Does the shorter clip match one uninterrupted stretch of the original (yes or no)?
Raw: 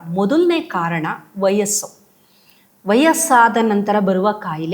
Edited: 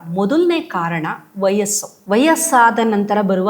no